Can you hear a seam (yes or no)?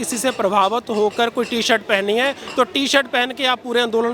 no